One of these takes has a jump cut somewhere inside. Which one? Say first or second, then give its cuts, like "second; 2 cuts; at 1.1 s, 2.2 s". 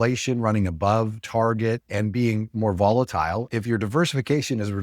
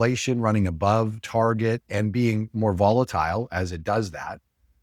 first; 1 cut; at 3.5 s